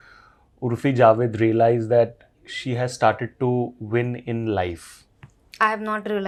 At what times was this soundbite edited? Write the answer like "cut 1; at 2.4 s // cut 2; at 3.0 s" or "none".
none